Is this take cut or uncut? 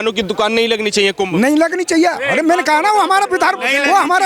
uncut